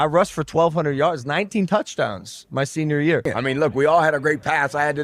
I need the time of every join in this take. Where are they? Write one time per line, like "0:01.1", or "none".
0:03.2